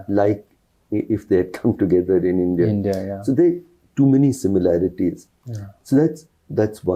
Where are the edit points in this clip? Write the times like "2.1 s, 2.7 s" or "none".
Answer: none